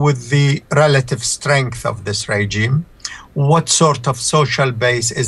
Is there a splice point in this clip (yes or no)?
no